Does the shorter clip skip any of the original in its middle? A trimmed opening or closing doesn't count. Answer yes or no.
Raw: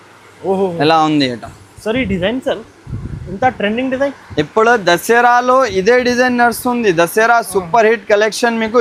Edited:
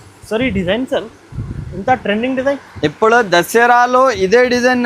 no